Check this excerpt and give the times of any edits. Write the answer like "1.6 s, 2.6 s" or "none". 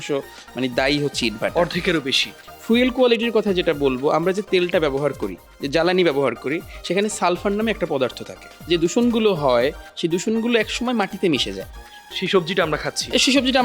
2.3 s, 8.5 s